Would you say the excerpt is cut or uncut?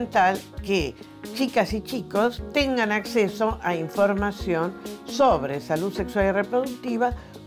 cut